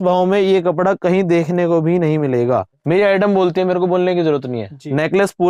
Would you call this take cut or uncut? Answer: cut